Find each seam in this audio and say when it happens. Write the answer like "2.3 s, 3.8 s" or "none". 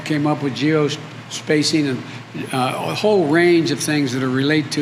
none